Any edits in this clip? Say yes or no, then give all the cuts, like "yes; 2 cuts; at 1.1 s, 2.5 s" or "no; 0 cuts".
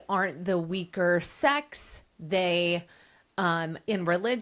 no; 0 cuts